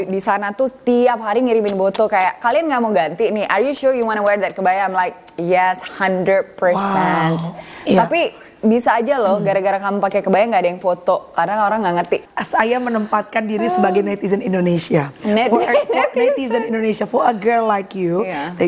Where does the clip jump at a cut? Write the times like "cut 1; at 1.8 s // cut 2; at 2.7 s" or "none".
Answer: cut 1; at 12.2 s